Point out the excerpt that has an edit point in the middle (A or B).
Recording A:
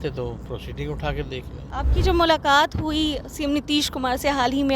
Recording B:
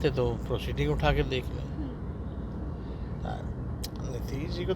A